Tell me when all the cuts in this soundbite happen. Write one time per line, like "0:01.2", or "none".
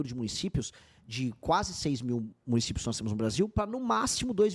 none

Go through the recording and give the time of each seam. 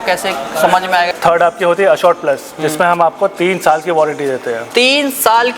0:01.1

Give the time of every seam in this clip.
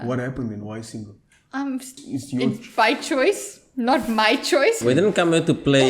0:02.0
0:04.8

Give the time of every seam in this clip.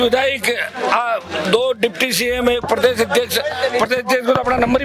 none

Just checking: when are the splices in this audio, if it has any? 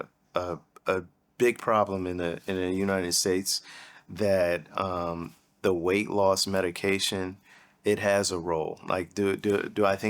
0:01.2

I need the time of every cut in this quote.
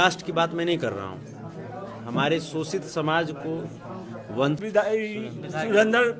0:04.6

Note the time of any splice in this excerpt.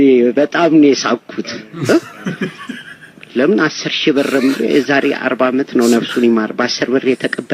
0:01.6

